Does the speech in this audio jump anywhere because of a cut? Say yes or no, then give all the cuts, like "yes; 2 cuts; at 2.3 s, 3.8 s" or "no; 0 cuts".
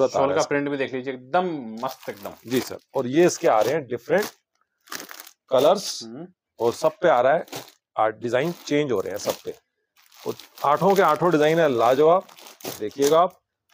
no; 0 cuts